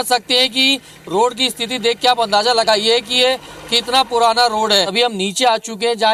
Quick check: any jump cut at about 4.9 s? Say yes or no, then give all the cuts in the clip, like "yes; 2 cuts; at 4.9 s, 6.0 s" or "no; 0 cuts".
yes; 1 cut; at 4.9 s